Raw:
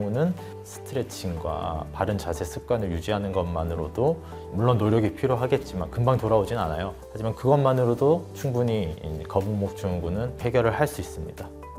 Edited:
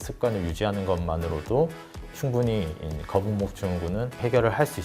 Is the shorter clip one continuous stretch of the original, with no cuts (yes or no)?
no